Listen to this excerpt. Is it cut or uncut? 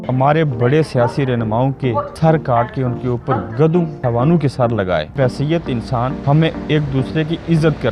cut